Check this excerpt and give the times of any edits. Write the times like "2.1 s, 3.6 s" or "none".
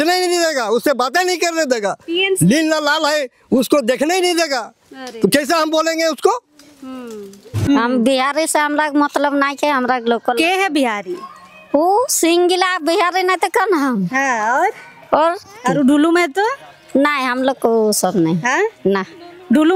7.6 s